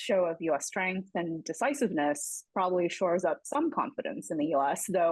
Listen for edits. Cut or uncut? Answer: uncut